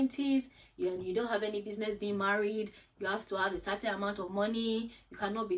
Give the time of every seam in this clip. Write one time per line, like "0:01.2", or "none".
none